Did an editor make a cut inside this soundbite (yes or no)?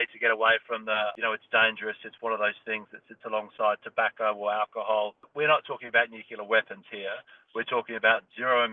yes